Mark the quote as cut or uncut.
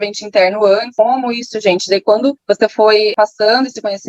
cut